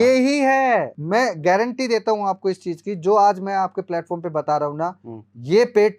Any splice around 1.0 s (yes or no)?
yes